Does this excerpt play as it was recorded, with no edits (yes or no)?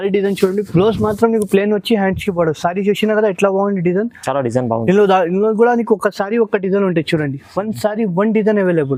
yes